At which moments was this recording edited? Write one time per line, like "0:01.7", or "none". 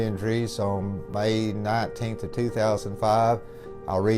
0:01.0